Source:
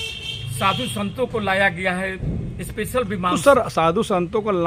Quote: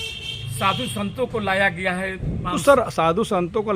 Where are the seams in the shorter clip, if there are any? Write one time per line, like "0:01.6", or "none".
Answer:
0:02.5